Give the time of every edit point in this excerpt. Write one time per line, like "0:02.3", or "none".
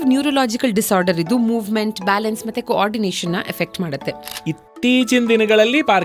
0:04.3